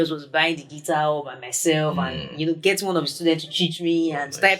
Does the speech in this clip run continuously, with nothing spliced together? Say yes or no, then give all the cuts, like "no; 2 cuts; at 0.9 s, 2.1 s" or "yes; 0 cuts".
yes; 0 cuts